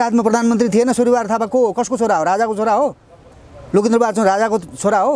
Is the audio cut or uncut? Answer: uncut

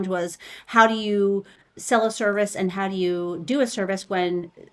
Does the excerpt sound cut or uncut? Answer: uncut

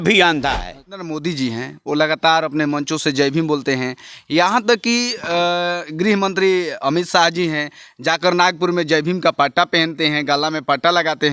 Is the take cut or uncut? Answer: cut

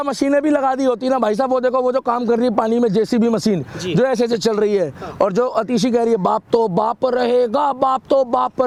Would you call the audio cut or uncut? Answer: uncut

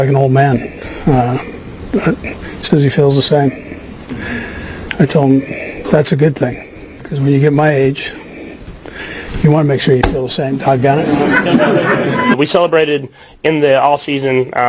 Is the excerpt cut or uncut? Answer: cut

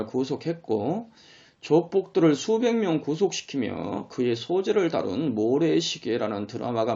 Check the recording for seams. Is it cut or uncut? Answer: cut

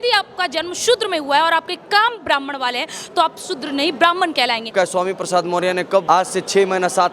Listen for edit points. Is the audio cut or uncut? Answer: cut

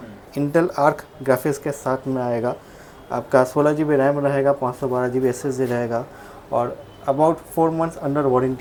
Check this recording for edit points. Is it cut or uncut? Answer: uncut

